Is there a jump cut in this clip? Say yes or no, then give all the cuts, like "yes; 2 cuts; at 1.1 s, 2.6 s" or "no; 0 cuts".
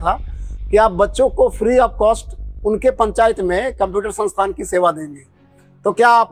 no; 0 cuts